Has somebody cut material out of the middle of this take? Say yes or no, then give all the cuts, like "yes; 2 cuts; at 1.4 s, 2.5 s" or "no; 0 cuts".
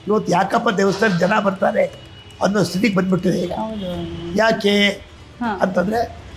no; 0 cuts